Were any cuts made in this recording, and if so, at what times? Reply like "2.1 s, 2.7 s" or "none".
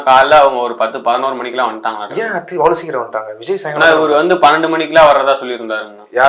none